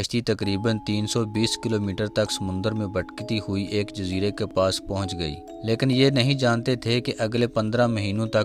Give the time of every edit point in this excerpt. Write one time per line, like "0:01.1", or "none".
0:05.4